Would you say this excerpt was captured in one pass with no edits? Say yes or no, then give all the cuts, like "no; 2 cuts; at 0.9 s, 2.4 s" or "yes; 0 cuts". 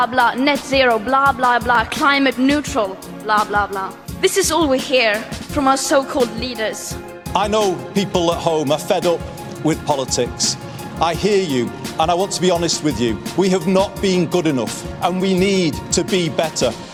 yes; 0 cuts